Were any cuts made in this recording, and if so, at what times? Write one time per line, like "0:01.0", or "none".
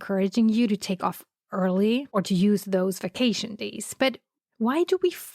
0:02.1